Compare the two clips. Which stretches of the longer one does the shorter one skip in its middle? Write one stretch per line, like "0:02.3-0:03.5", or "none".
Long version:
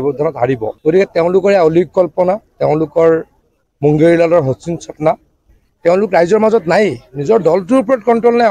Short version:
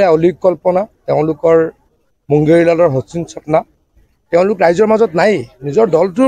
none